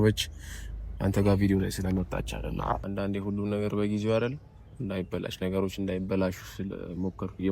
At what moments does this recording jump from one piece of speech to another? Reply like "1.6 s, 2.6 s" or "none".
2.8 s